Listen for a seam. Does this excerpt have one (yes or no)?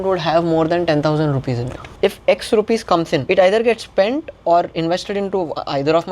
yes